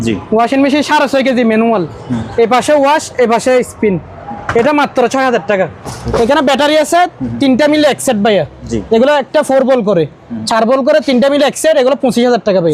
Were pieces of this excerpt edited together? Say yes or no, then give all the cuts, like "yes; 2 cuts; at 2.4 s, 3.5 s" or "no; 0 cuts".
yes; 1 cut; at 5.9 s